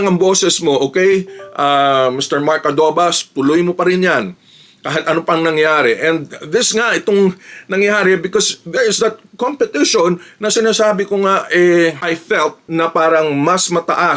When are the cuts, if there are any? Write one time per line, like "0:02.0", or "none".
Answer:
none

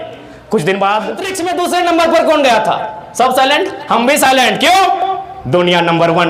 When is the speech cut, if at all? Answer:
0:01.3

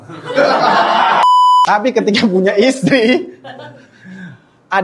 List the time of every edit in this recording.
0:01.2

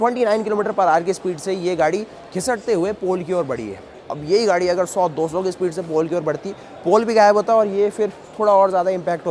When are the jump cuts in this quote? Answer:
none

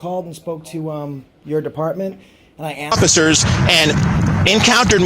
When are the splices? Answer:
0:02.9

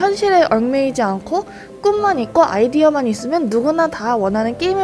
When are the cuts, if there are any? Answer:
none

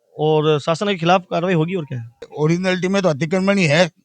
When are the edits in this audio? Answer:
0:02.3

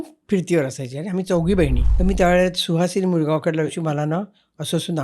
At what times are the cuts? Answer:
0:01.8
0:03.8

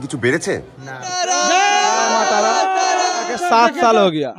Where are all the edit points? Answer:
0:01.0
0:03.4

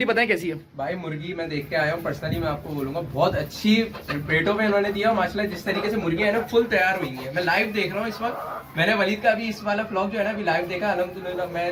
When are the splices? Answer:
none

